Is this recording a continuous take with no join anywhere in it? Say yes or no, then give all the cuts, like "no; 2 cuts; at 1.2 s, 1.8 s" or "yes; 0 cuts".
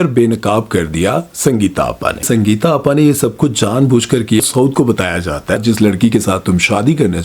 no; 3 cuts; at 2.2 s, 4.4 s, 5.6 s